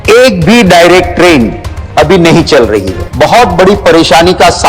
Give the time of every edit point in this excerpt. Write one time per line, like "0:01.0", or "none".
0:03.0